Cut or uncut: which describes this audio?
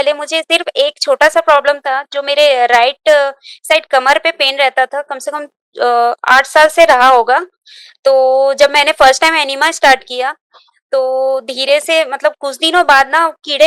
uncut